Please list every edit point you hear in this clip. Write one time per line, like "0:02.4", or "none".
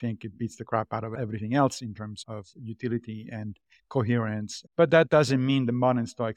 0:01.2
0:04.6